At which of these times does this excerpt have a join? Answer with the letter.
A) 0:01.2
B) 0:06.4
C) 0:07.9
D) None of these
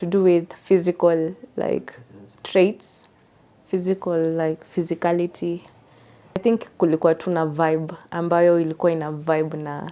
B